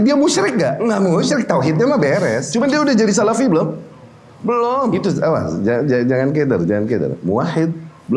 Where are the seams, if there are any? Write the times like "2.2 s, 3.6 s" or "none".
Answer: 0.8 s, 2.4 s, 4.9 s